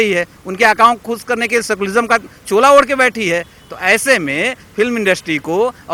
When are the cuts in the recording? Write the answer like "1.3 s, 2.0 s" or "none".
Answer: none